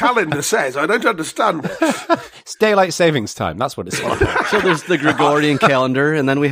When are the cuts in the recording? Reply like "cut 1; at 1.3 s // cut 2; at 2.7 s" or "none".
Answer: cut 1; at 4.6 s